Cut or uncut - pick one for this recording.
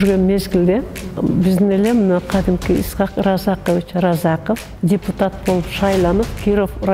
cut